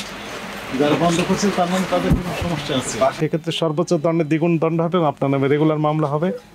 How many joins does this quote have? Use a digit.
1